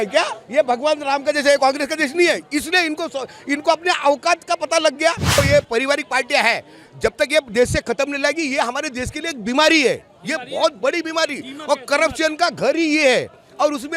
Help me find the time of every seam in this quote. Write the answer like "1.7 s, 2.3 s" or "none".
5.4 s